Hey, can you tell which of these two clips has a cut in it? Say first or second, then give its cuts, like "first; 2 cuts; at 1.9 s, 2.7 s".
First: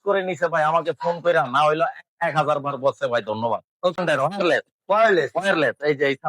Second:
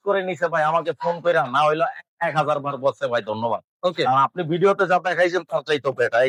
first; 1 cut; at 4.0 s